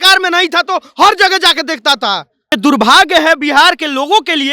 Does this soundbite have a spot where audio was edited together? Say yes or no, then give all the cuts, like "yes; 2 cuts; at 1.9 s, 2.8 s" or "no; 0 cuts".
yes; 1 cut; at 2.5 s